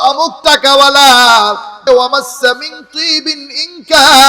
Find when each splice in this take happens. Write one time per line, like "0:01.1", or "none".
0:01.9